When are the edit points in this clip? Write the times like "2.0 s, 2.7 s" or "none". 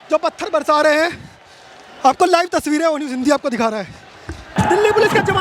none